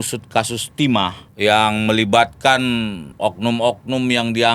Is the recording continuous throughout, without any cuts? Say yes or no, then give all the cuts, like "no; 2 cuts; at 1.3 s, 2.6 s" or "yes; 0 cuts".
no; 2 cuts; at 1.2 s, 3.0 s